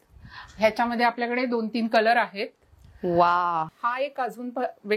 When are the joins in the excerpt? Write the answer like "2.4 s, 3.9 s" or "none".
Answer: 3.7 s